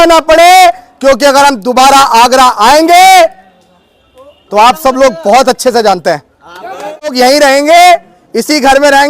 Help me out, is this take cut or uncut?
cut